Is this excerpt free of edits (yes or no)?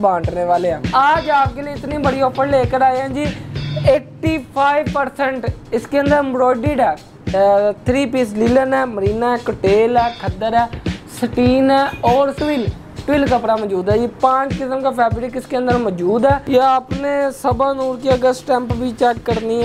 no